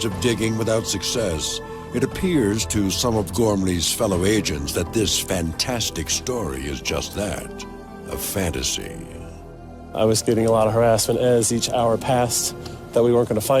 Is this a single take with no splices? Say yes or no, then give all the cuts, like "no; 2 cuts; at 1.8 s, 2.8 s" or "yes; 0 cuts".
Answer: no; 1 cut; at 9.2 s